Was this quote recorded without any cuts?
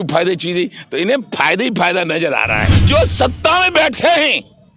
no; 1 cut; at 2.8 s

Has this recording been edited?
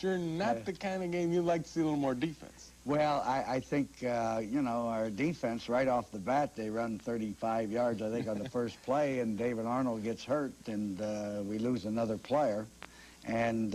yes; 1 cut; at 3.0 s

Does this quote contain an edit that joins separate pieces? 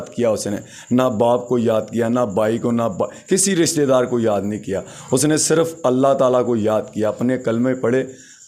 no; 0 cuts

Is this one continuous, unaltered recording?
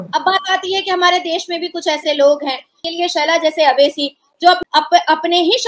no; 2 cuts; at 2.8 s, 4.4 s

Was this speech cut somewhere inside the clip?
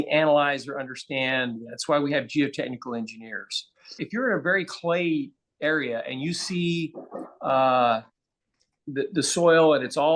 yes; 1 cut; at 4.0 s

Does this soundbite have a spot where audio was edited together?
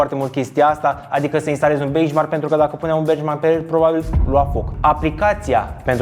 yes; 1 cut; at 4.7 s

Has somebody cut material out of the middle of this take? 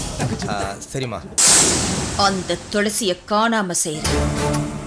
yes; 1 cut; at 1.3 s

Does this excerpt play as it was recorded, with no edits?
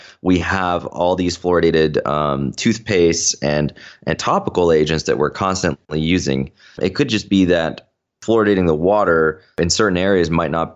no; 3 cuts; at 6.8 s, 8.1 s, 9.6 s

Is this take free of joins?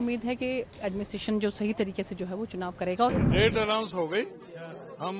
no; 1 cut; at 3.1 s

